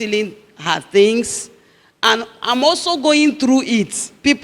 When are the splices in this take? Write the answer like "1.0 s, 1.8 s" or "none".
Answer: none